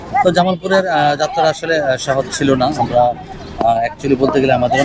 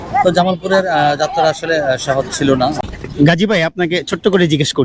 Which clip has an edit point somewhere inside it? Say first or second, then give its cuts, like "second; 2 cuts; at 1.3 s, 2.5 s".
second; 1 cut; at 2.8 s